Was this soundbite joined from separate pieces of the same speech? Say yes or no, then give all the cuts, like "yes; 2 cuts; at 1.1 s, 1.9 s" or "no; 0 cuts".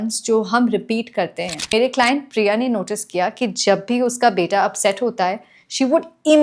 yes; 1 cut; at 1.7 s